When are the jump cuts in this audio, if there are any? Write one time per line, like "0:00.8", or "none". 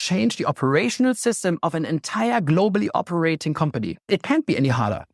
0:04.1